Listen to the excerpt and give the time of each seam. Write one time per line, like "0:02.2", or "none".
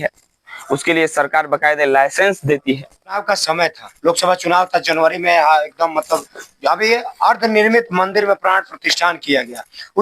0:03.2